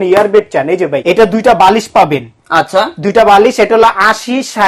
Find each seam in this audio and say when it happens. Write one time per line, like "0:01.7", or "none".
0:01.0